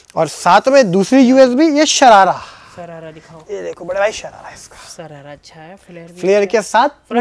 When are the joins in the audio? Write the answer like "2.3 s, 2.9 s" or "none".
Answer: none